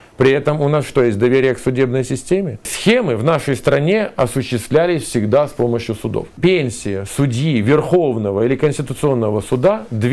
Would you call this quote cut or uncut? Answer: cut